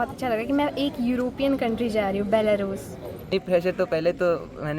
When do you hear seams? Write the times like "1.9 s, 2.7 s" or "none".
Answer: 3.1 s

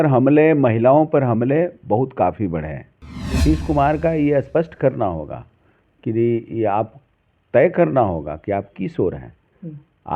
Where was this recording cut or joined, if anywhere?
3.4 s

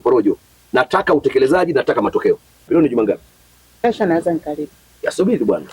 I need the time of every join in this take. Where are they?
2.7 s

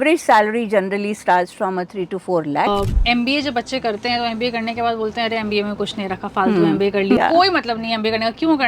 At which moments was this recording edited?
2.7 s, 7.2 s

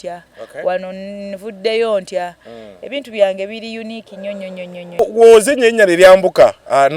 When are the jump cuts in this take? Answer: 5.0 s

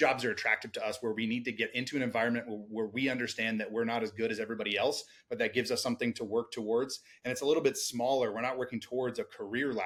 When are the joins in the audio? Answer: none

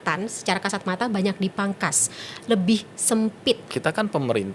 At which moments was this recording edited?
3.6 s

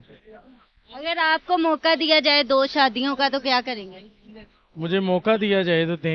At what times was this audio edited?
none

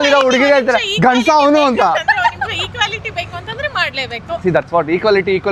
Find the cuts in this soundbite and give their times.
none

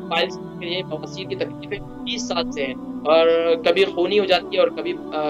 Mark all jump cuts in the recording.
none

